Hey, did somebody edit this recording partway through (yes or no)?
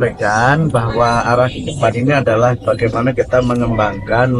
no